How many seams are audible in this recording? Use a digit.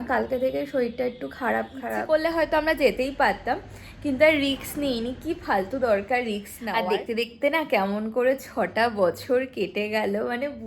2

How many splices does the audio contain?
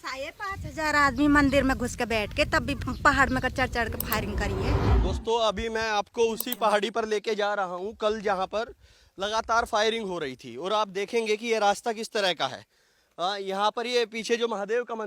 1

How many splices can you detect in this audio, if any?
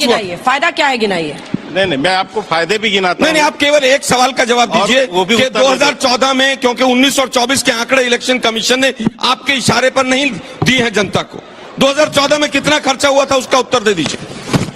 0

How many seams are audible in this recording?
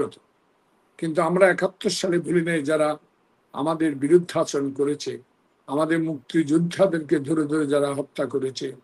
0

